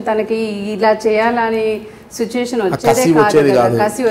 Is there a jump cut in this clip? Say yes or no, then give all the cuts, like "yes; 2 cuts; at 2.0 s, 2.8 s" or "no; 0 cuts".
no; 0 cuts